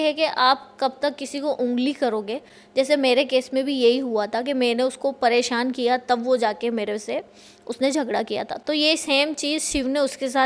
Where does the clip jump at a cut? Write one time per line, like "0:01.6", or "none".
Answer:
none

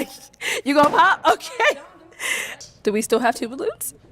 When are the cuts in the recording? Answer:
0:02.6

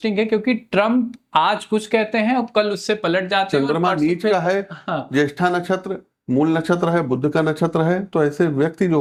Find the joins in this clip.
none

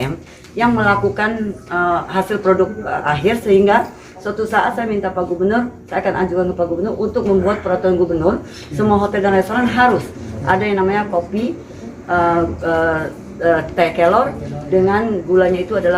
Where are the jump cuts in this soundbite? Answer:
none

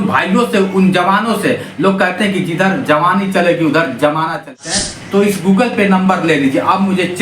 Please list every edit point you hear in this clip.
0:04.6

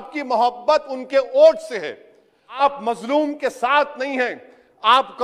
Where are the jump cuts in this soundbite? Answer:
0:02.6

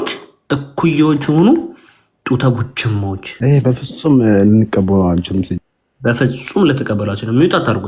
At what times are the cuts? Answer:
0:03.3

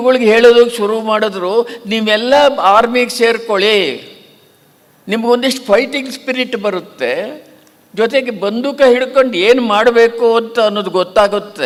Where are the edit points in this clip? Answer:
none

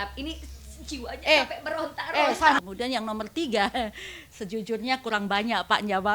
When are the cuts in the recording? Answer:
0:02.6

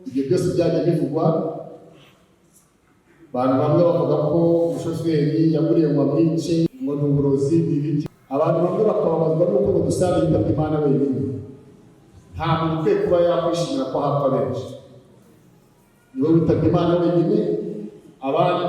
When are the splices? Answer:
0:06.7
0:08.0

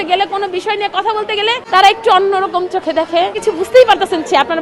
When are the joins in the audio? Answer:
0:01.6
0:03.4

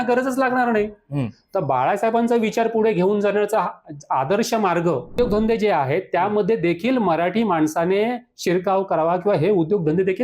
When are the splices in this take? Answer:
0:05.2

